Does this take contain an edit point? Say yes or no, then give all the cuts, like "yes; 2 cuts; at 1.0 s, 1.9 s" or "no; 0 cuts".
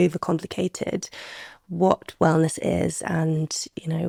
no; 0 cuts